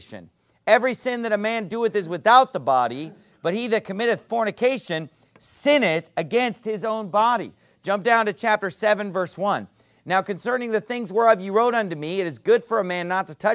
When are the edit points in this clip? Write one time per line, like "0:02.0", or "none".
0:07.0